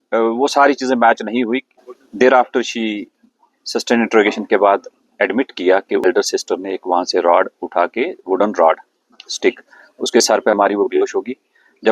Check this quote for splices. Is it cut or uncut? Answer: cut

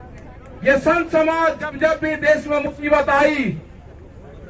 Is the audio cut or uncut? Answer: uncut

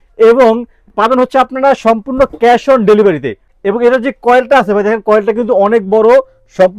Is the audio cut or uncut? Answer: cut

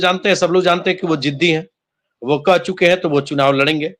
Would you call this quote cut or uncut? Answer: uncut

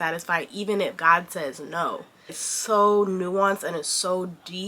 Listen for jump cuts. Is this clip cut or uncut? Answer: cut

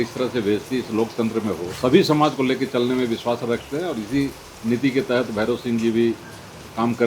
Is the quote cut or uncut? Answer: cut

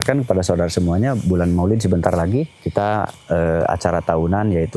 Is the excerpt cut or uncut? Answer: cut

